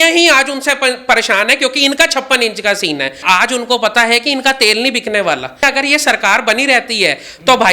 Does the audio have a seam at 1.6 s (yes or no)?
no